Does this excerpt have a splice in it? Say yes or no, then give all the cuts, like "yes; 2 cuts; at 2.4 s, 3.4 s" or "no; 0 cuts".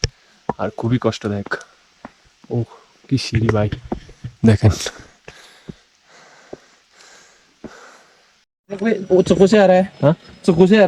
no; 0 cuts